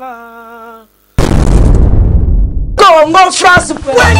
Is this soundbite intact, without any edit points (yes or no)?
no